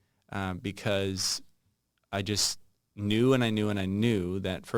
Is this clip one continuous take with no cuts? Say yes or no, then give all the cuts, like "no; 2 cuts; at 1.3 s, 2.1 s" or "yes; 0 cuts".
yes; 0 cuts